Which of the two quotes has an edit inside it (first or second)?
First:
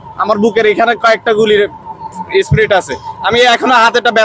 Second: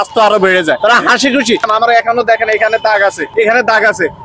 second